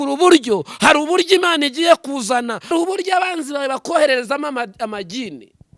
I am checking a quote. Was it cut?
yes; 1 cut; at 2.7 s

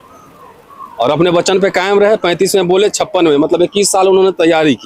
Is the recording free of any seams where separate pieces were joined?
yes; 0 cuts

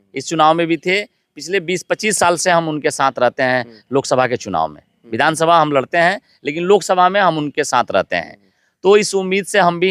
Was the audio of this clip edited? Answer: no; 0 cuts

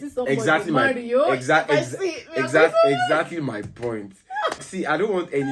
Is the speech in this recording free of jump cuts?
no; 1 cut; at 4.6 s

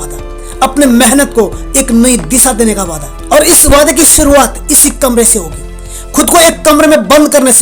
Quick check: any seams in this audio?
no; 0 cuts

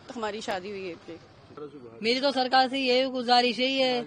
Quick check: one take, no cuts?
no; 1 cut; at 1.5 s

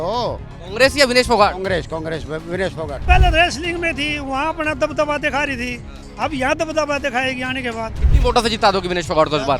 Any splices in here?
yes; 2 cuts; at 3.0 s, 8.0 s

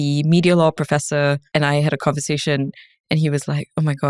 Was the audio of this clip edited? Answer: yes; 1 cut; at 1.4 s

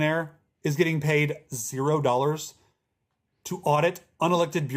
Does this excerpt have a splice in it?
no; 0 cuts

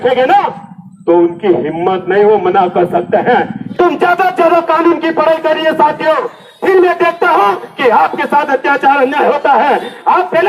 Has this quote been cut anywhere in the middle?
yes; 1 cut; at 3.6 s

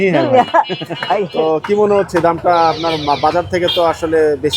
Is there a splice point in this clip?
yes; 1 cut; at 1.3 s

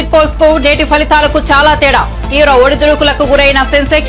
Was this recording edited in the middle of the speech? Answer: no; 0 cuts

